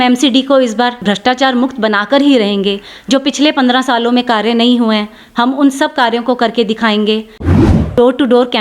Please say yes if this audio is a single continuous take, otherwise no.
no